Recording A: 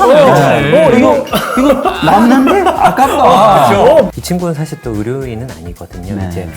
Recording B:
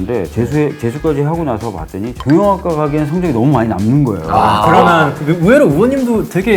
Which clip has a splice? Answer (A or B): A